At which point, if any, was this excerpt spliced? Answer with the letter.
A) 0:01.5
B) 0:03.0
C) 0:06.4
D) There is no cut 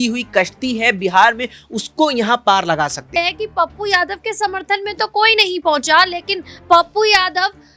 B